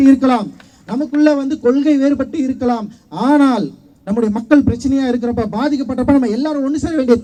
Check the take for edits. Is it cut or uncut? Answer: uncut